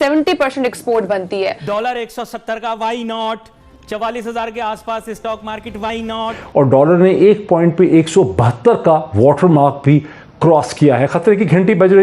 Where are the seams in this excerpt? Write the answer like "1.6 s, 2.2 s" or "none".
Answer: 1.6 s, 6.4 s